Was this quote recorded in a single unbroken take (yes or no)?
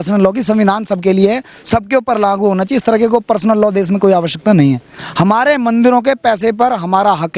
no